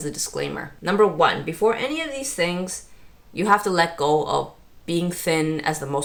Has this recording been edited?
no; 0 cuts

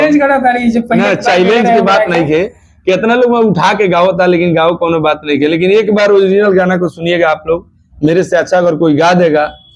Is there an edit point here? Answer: no; 0 cuts

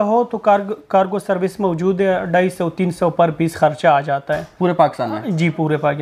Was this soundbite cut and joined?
no; 0 cuts

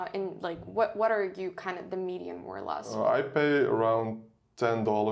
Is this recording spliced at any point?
yes; 1 cut; at 2.9 s

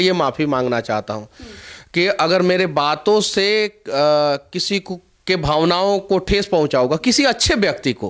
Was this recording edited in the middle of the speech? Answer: no; 0 cuts

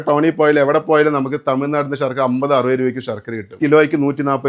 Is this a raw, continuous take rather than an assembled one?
no; 1 cut; at 3.6 s

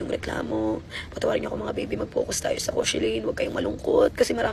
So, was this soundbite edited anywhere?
no; 0 cuts

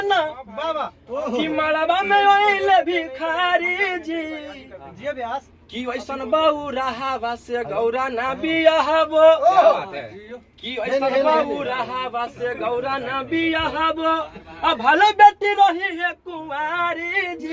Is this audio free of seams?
yes; 0 cuts

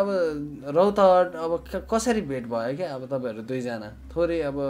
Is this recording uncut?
yes; 0 cuts

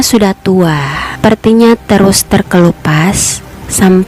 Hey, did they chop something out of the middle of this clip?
no; 0 cuts

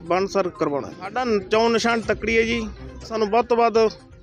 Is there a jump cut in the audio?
yes; 2 cuts; at 1.1 s, 3.1 s

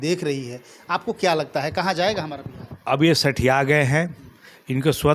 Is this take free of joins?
yes; 0 cuts

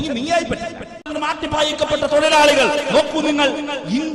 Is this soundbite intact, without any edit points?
no; 1 cut; at 1.1 s

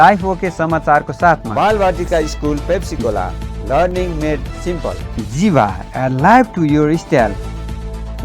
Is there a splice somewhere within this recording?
yes; 2 cuts; at 1.5 s, 5.1 s

